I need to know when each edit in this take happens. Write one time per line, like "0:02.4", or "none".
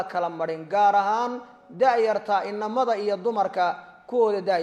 none